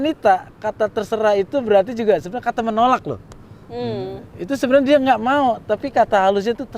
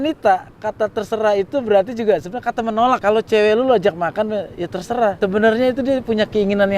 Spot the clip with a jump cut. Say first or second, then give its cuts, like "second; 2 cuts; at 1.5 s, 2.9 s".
second; 2 cuts; at 3.0 s, 5.2 s